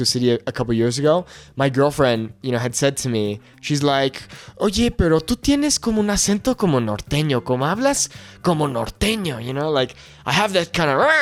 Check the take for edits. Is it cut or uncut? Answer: uncut